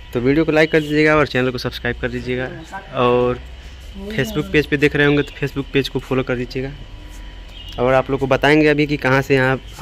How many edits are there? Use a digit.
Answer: 0